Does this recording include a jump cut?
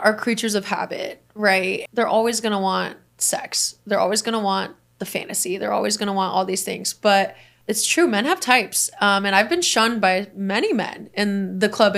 no; 0 cuts

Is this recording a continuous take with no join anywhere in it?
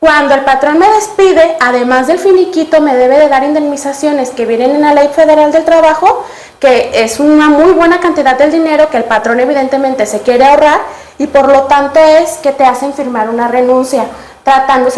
yes; 0 cuts

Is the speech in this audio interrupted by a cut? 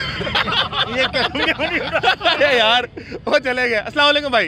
no; 0 cuts

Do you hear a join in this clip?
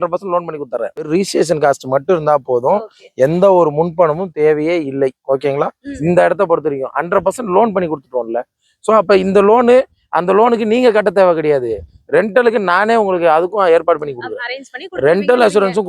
yes; 2 cuts; at 1.1 s, 5.8 s

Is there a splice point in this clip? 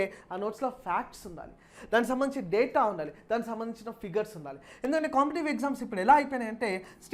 no; 0 cuts

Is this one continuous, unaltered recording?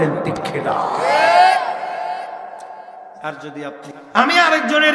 no; 1 cut; at 3.9 s

